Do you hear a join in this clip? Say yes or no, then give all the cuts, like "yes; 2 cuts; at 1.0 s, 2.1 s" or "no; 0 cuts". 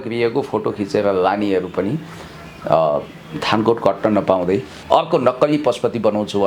no; 0 cuts